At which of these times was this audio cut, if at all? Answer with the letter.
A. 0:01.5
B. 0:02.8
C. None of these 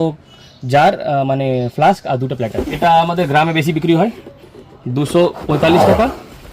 B